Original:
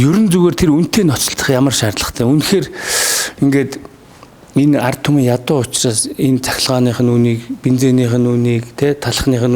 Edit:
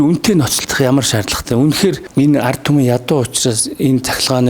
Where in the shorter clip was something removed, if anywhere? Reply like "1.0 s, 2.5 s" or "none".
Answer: 2.0 s